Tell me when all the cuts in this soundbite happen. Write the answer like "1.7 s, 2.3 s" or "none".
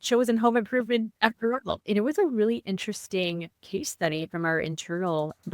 1.5 s, 3.6 s